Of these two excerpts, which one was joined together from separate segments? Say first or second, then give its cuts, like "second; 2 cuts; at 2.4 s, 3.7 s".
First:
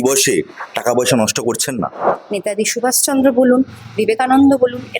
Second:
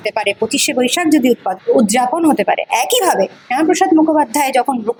first; 1 cut; at 2.1 s